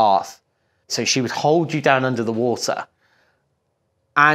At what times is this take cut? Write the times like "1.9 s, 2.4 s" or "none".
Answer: 0.9 s